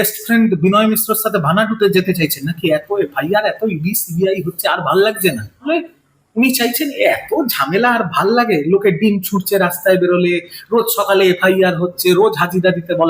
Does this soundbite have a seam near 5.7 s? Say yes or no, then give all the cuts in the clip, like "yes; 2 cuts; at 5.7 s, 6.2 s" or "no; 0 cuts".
yes; 1 cut; at 5.7 s